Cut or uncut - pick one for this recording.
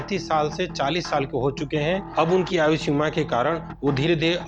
uncut